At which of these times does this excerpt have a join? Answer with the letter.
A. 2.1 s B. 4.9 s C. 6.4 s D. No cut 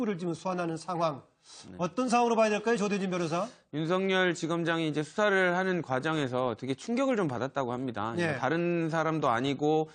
B